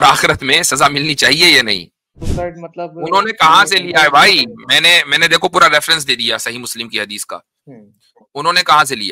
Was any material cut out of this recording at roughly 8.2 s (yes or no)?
no